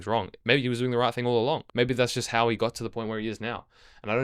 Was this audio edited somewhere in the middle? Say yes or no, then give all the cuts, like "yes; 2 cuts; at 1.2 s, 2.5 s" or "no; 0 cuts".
yes; 1 cut; at 1.7 s